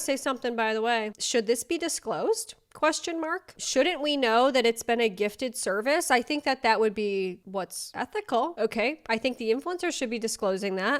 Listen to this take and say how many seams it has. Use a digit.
0